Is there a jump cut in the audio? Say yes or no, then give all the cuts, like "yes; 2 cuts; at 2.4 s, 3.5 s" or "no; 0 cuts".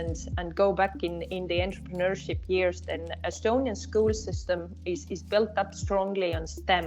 no; 0 cuts